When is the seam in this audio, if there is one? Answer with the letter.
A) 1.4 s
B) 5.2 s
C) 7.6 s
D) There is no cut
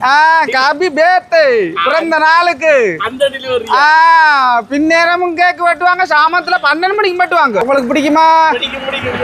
C